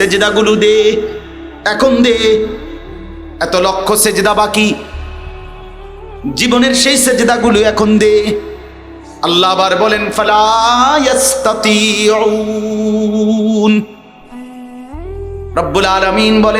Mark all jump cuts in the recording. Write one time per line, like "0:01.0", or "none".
0:14.1
0:15.5

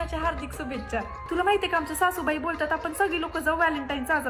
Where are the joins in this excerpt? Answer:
0:01.2

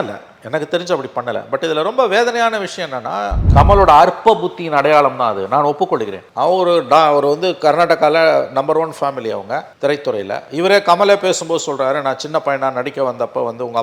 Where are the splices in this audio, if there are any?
0:03.4

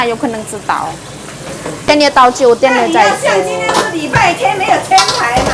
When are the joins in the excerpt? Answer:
0:01.9

